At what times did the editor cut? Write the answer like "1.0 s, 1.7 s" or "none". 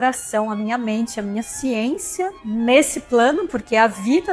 2.4 s